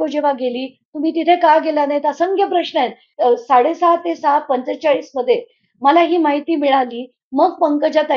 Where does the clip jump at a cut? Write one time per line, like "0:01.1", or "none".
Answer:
0:03.0

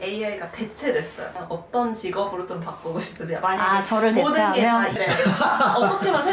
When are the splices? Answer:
0:01.3
0:05.0

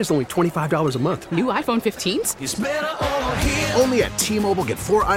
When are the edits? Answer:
none

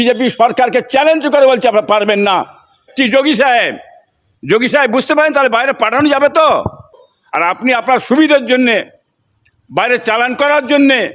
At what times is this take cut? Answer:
0:02.8
0:07.0

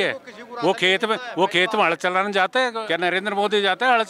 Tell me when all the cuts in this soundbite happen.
0:02.7

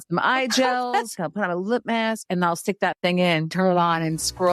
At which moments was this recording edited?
0:03.5

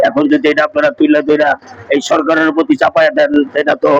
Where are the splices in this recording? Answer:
none

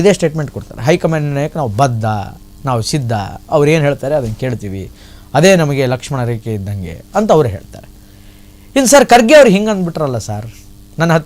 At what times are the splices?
none

